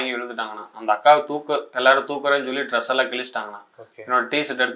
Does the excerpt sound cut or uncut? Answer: uncut